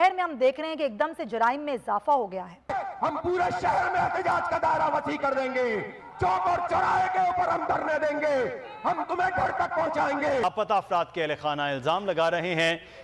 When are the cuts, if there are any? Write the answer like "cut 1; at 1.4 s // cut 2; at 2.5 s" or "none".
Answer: cut 1; at 2.7 s // cut 2; at 10.4 s